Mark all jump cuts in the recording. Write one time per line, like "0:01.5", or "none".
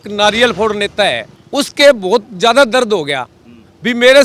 0:01.3